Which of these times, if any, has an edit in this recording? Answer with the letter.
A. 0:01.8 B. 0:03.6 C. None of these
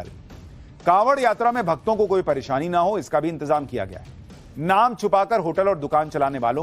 A